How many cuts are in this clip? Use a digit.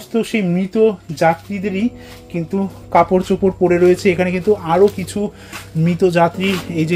0